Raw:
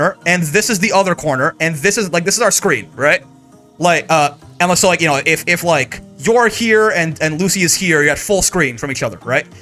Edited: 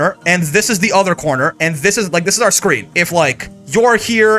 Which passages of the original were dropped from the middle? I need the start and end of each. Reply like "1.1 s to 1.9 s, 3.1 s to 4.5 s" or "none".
2.9 s to 5.4 s